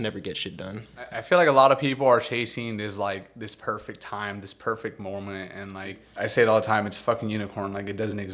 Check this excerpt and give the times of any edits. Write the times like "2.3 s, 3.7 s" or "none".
1.2 s, 6.0 s